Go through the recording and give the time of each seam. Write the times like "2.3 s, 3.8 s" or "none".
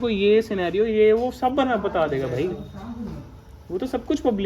none